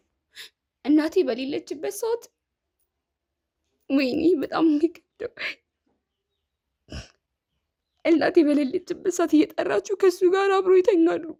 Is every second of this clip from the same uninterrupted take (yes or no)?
yes